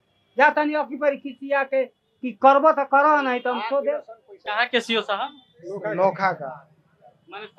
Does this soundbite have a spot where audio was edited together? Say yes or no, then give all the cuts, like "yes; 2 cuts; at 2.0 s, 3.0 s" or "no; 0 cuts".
yes; 1 cut; at 4.4 s